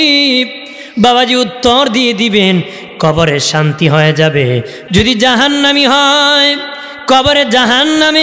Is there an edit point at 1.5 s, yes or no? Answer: no